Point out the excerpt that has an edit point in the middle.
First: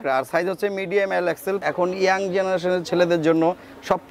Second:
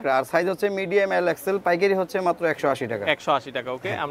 first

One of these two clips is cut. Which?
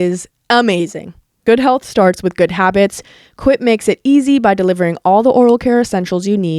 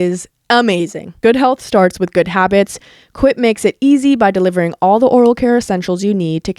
second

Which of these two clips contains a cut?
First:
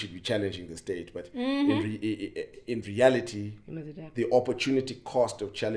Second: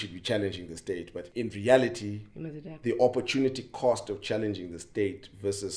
second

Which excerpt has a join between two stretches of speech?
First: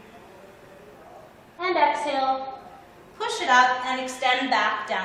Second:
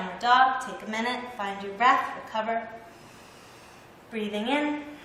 second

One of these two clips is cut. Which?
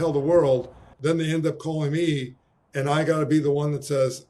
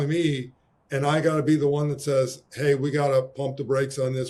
first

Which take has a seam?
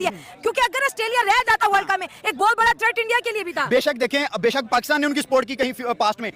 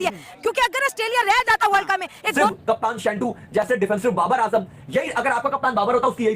second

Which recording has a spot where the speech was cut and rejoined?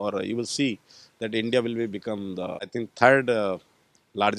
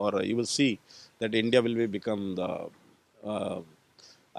first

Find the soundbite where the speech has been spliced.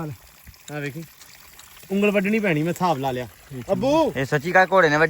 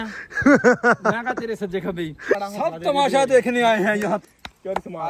second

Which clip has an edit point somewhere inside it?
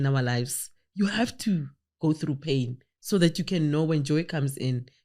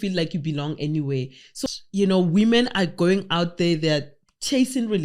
second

